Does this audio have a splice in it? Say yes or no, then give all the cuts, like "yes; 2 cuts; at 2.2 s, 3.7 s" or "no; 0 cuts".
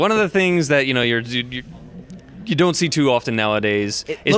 yes; 1 cut; at 2.4 s